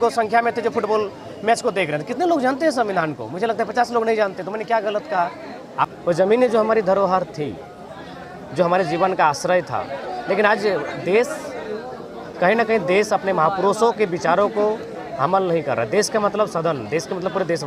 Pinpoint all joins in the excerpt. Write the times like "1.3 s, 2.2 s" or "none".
5.9 s